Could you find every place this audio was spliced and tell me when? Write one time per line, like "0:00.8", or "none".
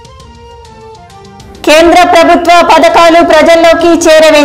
0:00.9